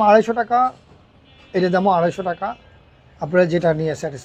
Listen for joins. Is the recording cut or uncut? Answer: uncut